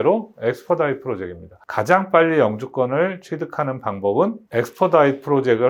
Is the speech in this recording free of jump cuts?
no; 1 cut; at 1.6 s

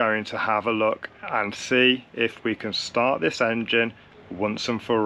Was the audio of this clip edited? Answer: no; 0 cuts

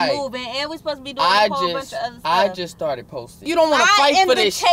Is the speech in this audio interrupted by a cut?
yes; 1 cut; at 3.5 s

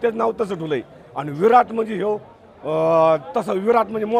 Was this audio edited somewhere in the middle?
no; 0 cuts

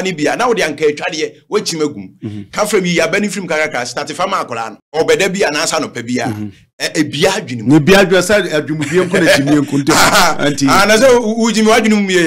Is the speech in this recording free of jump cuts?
no; 1 cut; at 4.8 s

